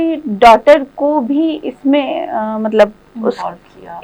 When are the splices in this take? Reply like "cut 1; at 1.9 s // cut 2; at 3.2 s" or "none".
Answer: none

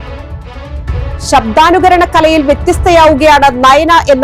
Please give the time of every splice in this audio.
cut 1; at 0.9 s

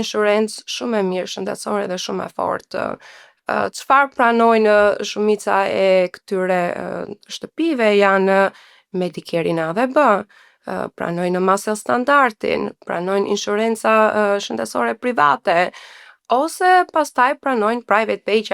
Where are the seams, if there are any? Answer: none

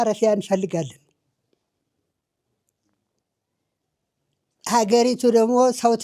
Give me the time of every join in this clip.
none

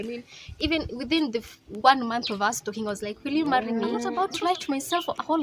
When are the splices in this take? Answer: cut 1; at 4.1 s

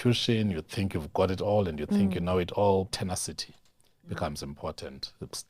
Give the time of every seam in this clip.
cut 1; at 2.9 s

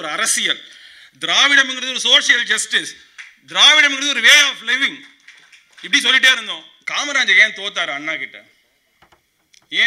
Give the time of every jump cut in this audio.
cut 1; at 6.7 s

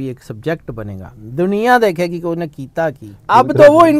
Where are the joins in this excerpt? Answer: cut 1; at 3.1 s

